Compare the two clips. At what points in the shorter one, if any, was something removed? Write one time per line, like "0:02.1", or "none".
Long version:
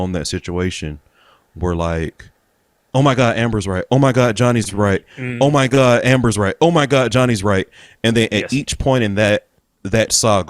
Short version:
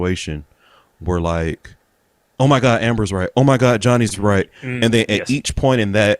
0:04.6